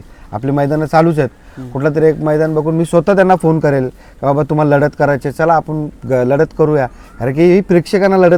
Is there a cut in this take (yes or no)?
no